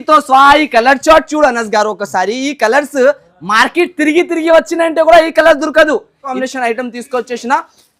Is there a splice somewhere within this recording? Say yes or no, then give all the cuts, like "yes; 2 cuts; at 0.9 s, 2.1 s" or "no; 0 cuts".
yes; 1 cut; at 6.4 s